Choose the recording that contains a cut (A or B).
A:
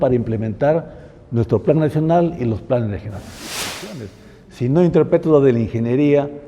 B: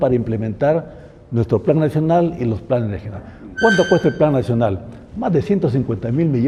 A